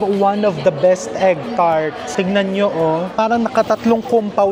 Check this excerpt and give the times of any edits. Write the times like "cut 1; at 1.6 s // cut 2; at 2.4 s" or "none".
cut 1; at 2.0 s // cut 2; at 3.1 s